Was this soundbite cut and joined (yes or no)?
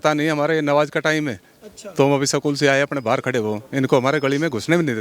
no